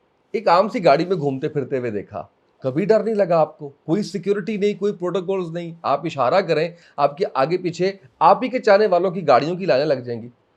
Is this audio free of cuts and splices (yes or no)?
yes